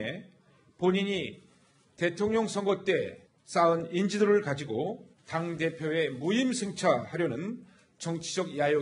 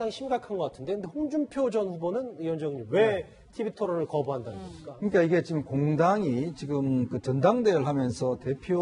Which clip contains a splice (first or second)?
second